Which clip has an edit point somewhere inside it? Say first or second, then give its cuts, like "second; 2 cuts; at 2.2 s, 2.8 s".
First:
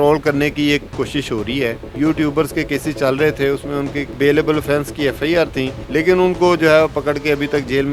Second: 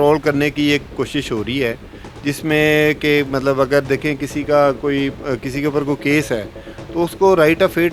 first; 3 cuts; at 1.9 s, 4.1 s, 5.8 s